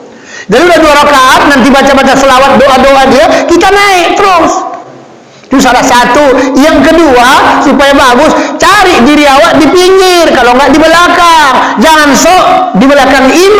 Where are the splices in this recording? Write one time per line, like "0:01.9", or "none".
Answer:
none